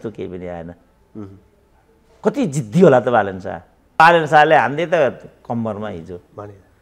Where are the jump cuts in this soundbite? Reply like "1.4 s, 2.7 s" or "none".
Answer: 4.0 s